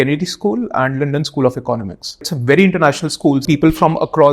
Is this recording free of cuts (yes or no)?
no